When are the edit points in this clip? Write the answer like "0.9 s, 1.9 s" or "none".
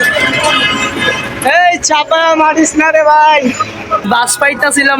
4.0 s